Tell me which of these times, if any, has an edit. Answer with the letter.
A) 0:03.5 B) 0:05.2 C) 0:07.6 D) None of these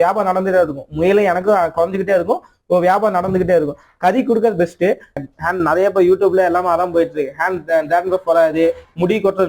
B